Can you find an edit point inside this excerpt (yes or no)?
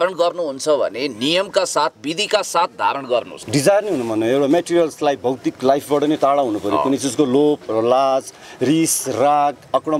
yes